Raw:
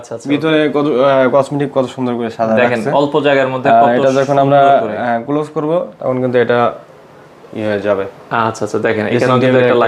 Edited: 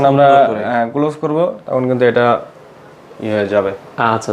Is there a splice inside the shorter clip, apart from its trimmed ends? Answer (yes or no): no